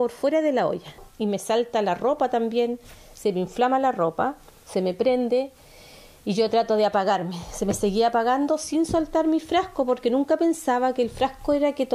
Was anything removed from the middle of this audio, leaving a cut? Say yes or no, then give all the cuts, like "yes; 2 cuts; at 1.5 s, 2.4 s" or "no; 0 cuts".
yes; 1 cut; at 1.1 s